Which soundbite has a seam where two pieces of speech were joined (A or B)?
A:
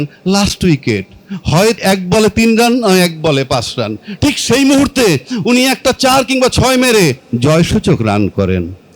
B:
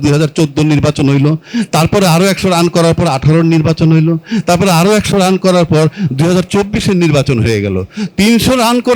A